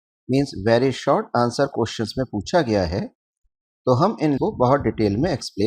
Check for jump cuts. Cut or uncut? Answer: cut